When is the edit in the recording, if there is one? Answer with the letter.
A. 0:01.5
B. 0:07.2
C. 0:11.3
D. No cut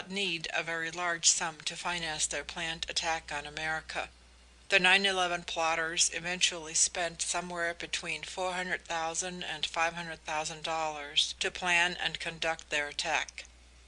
B